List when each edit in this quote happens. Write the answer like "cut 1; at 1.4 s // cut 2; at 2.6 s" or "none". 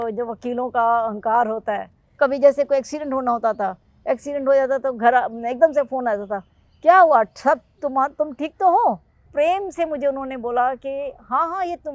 cut 1; at 2.2 s // cut 2; at 9.3 s